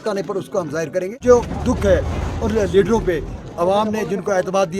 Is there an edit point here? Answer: yes; 1 cut; at 1.2 s

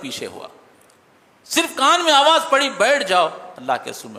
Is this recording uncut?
yes; 0 cuts

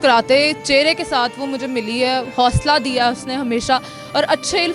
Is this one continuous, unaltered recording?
yes; 0 cuts

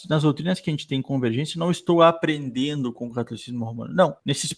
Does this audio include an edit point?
no; 0 cuts

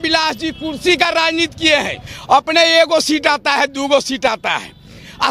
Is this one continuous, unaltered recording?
no; 1 cut; at 2.1 s

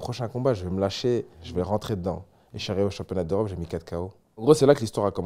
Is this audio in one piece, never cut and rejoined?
no; 2 cuts; at 1.4 s, 4.4 s

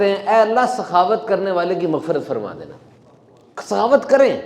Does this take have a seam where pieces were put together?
no; 0 cuts

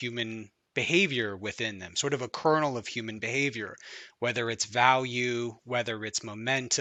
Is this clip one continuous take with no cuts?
yes; 0 cuts

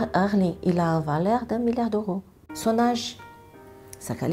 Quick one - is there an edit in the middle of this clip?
yes; 1 cut; at 2.5 s

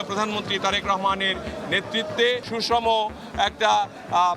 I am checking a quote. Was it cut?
yes; 1 cut; at 2.4 s

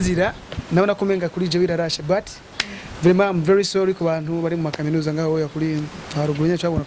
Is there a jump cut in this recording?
no; 0 cuts

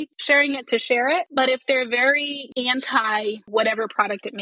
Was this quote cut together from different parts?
yes; 3 cuts; at 1.3 s, 2.4 s, 3.4 s

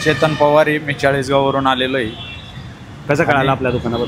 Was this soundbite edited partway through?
no; 0 cuts

